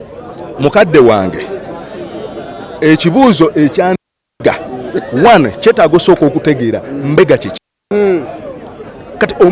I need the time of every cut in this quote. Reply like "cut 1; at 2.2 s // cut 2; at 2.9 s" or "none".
none